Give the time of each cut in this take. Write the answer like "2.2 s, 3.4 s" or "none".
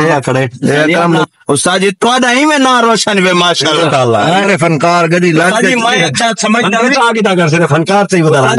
1.2 s, 4.4 s